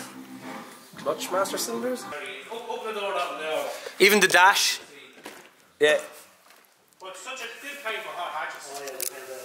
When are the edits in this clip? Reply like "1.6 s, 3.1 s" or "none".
2.1 s